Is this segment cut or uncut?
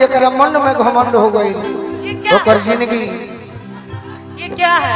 uncut